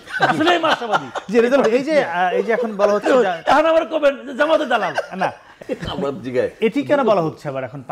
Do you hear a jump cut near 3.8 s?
no; 1 cut; at 5.5 s

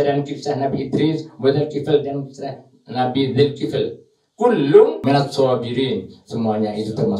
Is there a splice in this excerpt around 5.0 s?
yes; 1 cut; at 5.0 s

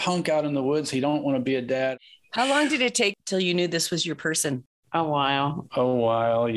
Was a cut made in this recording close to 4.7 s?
no; 2 cuts; at 1.9 s, 3.2 s

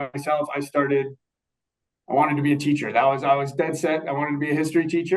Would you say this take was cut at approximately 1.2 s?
no; 0 cuts

